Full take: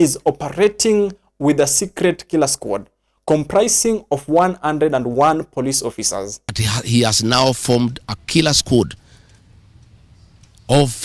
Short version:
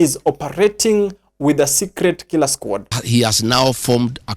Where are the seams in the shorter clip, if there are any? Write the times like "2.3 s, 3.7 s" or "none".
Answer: 2.9 s

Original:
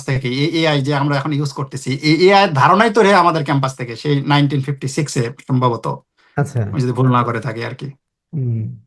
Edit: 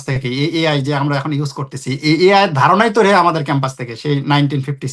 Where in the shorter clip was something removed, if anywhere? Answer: none

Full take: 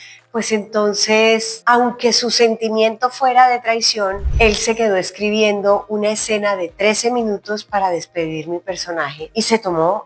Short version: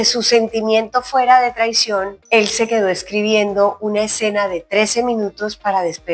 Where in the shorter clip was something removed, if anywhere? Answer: none

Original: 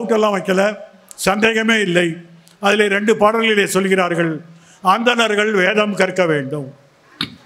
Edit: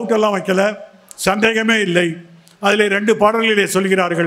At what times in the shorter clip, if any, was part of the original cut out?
none

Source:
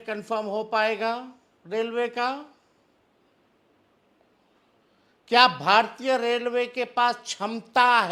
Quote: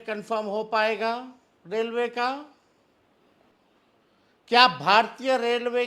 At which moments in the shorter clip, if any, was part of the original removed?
3.4 s

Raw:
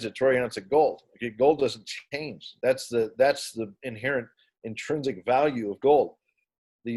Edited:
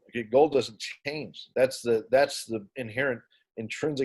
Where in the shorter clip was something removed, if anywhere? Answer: none

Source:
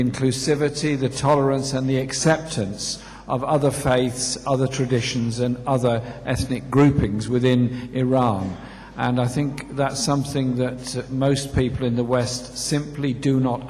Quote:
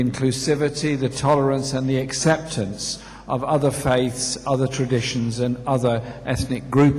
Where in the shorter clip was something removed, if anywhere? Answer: none

